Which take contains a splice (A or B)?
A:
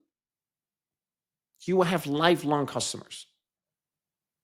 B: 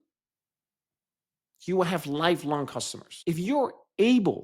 B